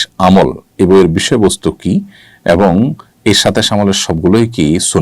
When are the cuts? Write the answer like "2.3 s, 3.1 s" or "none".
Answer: none